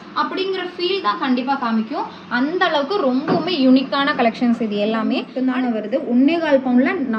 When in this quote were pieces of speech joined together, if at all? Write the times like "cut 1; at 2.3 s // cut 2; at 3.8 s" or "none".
cut 1; at 5.3 s